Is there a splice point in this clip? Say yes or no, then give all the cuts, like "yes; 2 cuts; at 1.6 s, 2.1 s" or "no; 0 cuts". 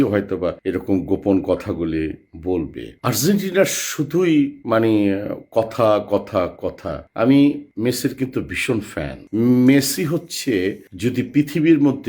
yes; 2 cuts; at 2.9 s, 9.2 s